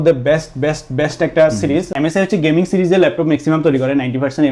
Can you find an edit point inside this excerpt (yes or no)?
yes